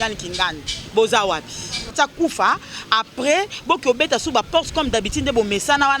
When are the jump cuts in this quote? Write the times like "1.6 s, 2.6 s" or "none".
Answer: 1.9 s